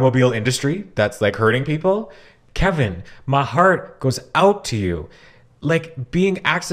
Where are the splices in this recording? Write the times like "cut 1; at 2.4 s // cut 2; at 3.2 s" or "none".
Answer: cut 1; at 2.4 s